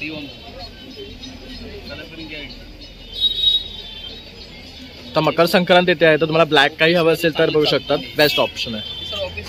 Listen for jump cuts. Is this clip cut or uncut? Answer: uncut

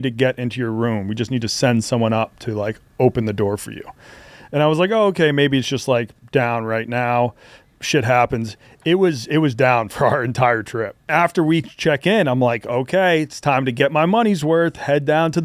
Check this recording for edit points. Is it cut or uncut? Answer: cut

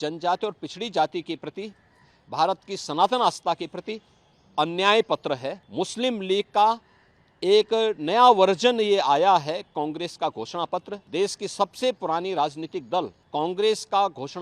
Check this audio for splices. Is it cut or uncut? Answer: cut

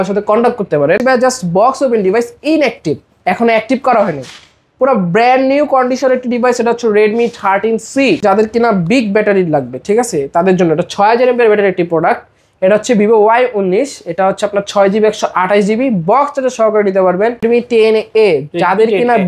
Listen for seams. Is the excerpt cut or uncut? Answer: cut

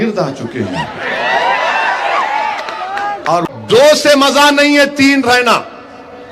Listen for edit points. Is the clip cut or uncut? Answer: cut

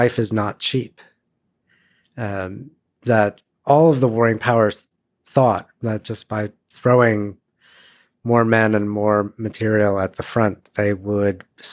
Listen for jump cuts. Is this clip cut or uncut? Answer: uncut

